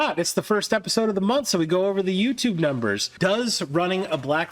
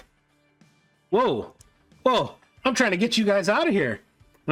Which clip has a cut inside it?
first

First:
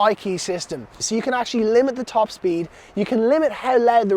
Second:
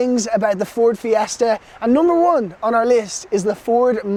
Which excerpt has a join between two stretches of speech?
first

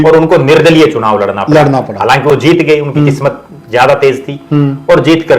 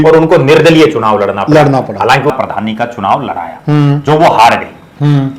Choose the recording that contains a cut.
second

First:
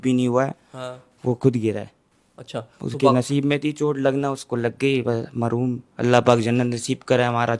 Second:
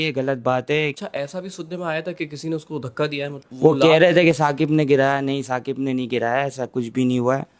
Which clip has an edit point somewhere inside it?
second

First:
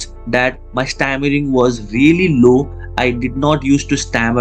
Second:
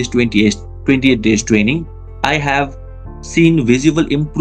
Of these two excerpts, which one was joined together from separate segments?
second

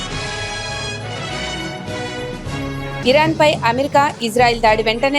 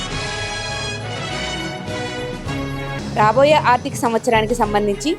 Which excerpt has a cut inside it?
second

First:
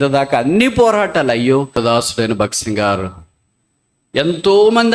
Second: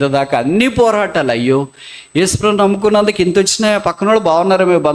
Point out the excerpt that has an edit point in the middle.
first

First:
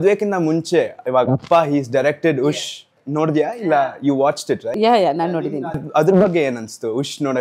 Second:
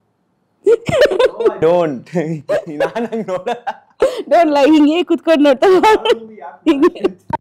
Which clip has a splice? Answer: first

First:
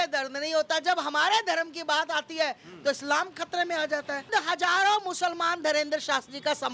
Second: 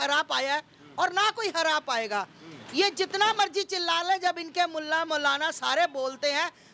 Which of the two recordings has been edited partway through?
first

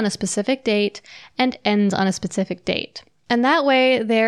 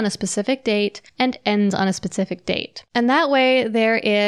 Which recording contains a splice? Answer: second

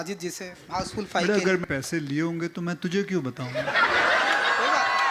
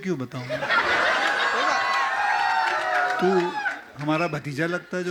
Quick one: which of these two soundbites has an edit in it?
first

